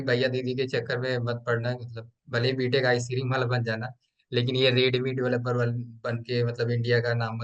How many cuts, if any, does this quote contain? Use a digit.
0